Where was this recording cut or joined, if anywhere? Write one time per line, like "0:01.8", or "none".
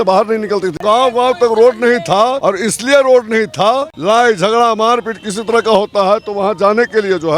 0:00.8
0:02.4
0:03.9